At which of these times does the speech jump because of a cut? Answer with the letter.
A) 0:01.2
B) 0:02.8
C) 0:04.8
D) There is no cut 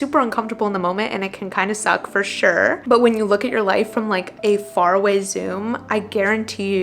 B